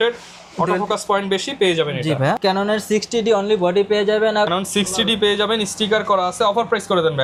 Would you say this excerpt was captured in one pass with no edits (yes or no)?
yes